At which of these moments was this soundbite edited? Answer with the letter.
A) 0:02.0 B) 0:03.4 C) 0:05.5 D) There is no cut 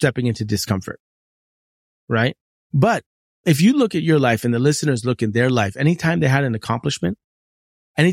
B